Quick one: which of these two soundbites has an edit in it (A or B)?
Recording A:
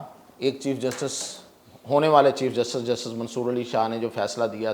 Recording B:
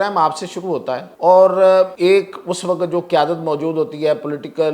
B